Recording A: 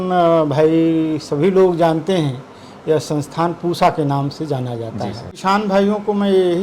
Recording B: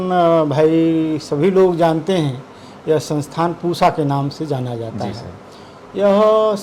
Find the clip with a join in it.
A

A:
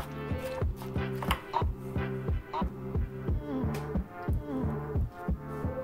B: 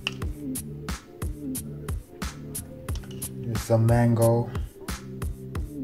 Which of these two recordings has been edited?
B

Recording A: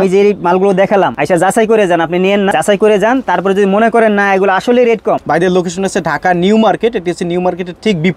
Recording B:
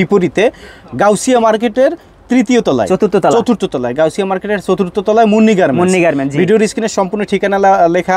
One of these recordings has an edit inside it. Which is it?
A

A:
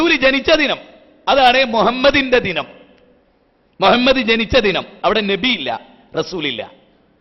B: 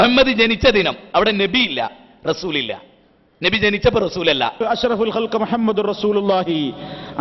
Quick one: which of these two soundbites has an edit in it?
B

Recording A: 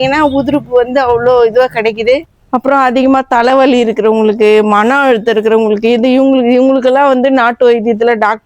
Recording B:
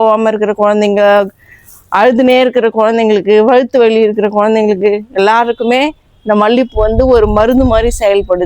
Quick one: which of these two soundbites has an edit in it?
A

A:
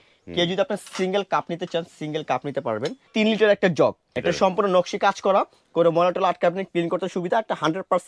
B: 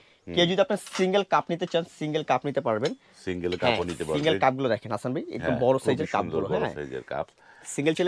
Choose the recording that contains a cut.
A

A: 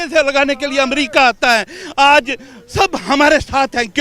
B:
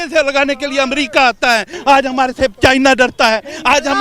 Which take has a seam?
B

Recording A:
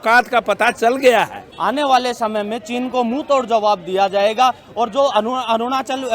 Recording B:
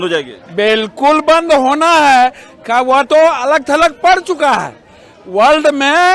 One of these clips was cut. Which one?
A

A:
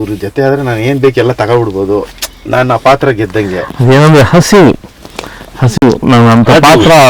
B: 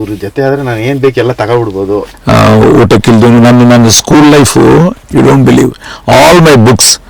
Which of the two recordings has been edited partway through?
B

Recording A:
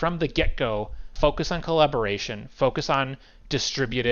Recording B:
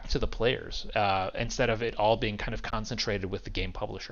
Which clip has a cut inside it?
A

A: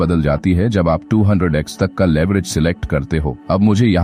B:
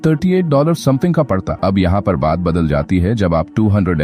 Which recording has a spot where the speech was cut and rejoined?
B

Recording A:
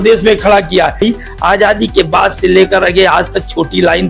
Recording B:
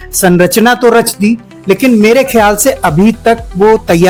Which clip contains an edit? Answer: A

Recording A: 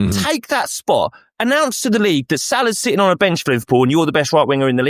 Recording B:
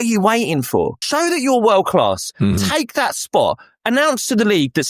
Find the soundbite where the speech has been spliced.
B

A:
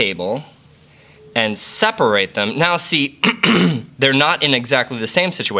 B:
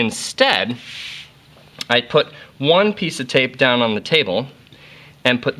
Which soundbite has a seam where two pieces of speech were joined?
A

